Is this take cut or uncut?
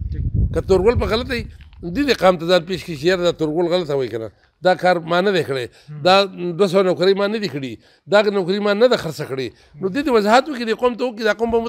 uncut